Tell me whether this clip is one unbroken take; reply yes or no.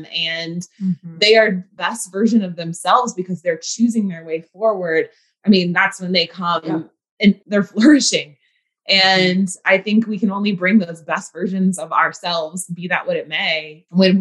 no